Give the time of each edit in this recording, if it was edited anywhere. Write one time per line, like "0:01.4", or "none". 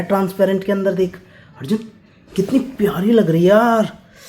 none

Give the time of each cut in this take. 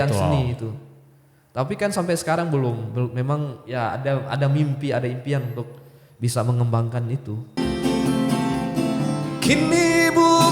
0:07.6

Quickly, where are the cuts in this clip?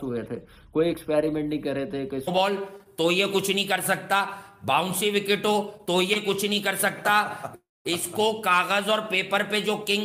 0:02.3

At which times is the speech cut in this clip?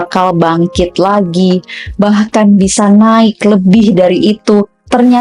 none

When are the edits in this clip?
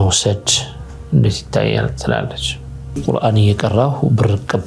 0:03.0

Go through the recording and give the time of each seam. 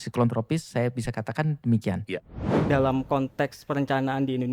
0:02.6

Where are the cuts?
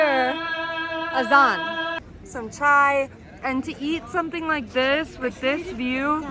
0:02.0

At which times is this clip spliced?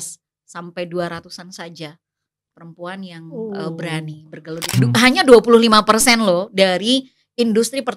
0:04.8

